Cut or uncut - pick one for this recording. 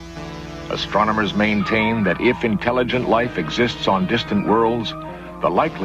cut